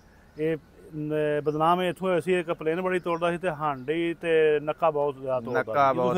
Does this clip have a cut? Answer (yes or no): no